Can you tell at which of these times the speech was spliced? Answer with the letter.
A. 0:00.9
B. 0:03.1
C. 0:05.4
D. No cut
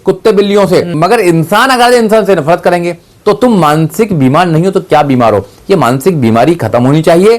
A